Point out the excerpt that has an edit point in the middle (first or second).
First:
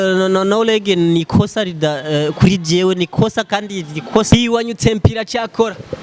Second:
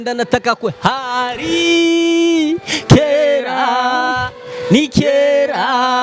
first